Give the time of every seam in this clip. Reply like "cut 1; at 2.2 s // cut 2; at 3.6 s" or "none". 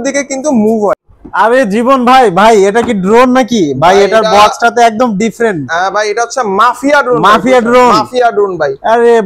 cut 1; at 1.1 s